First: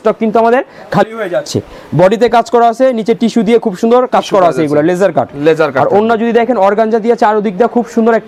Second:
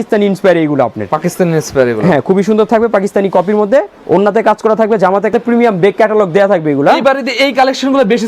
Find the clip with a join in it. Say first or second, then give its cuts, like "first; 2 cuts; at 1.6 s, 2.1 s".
second; 1 cut; at 5.3 s